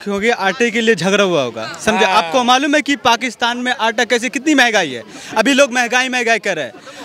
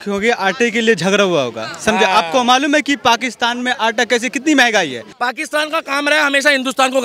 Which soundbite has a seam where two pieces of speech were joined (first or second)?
second